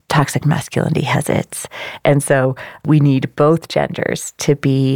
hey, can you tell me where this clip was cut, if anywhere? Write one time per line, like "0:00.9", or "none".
0:02.8